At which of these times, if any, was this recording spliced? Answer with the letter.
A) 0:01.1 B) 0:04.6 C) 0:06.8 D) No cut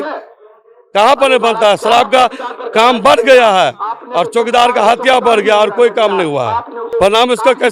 C